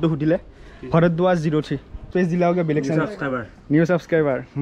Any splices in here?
yes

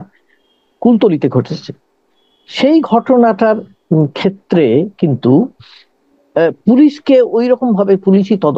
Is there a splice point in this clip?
no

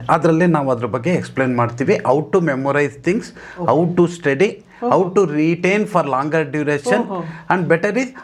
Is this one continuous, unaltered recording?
yes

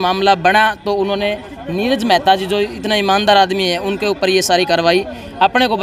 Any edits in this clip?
no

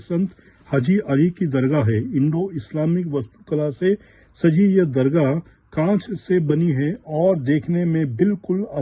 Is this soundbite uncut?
yes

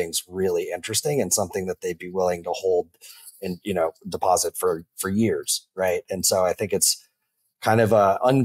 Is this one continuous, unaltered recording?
yes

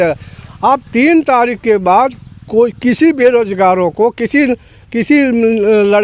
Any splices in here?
no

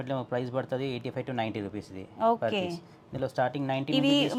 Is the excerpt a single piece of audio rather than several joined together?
yes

